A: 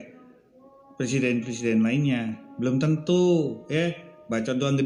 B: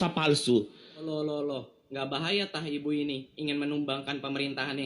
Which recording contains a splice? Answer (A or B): B